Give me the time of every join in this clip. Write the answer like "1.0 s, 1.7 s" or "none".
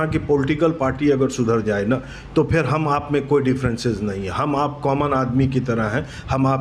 none